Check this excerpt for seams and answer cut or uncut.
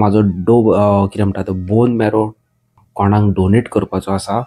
cut